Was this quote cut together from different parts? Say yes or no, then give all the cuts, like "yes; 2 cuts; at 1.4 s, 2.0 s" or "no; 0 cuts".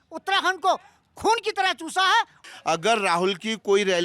yes; 1 cut; at 2.4 s